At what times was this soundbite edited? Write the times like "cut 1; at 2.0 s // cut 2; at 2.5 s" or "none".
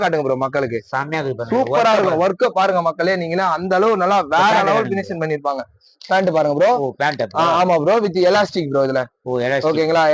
none